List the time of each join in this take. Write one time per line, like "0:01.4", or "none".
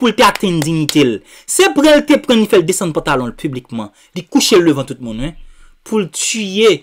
none